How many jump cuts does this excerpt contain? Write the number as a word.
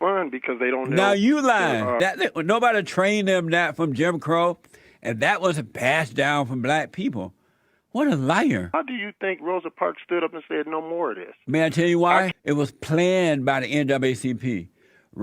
three